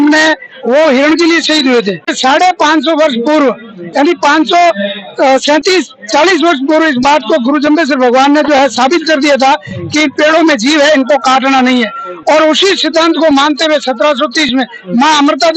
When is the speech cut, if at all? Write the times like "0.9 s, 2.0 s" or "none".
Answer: 2.1 s